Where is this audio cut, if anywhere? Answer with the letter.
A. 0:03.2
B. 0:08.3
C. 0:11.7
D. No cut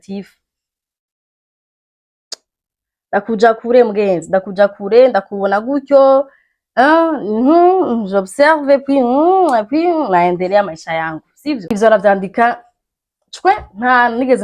C